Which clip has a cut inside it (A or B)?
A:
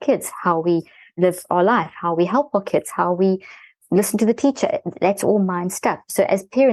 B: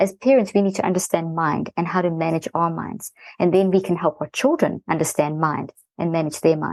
A